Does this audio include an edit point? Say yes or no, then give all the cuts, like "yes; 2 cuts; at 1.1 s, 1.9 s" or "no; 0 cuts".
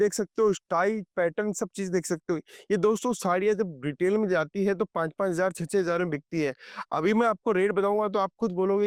no; 0 cuts